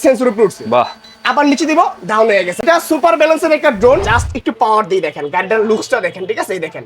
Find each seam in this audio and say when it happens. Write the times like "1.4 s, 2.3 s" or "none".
2.6 s, 4.1 s